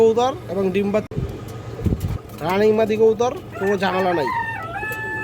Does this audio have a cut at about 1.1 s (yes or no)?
yes